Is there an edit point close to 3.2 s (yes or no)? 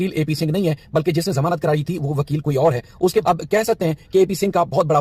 yes